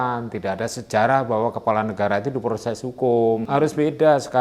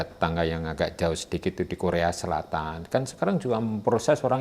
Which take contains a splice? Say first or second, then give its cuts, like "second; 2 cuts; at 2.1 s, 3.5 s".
first; 1 cut; at 3.4 s